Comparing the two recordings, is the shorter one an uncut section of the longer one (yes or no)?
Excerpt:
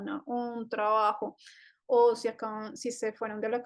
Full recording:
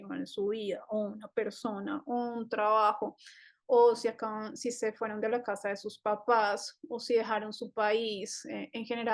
yes